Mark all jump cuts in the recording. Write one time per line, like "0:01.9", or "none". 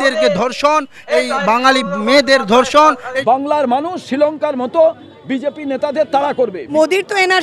0:03.1
0:06.6